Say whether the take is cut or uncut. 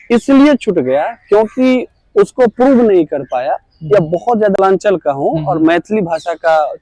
cut